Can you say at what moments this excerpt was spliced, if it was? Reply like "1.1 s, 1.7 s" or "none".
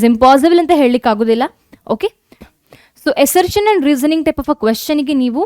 2.5 s